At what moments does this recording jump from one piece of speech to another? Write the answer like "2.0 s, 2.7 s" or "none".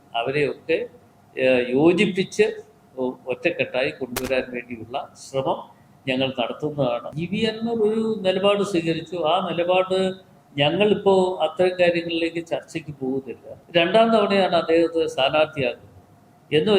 7.1 s, 13.5 s